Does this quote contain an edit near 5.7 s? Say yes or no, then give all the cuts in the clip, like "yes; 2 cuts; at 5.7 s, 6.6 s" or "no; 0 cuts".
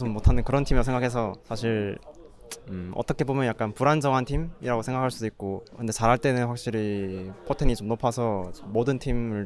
yes; 2 cuts; at 1.4 s, 5.7 s